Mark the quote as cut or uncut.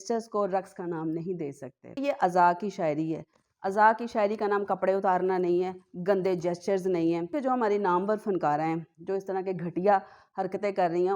cut